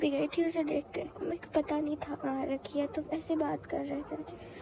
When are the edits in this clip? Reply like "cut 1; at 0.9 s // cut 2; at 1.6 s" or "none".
none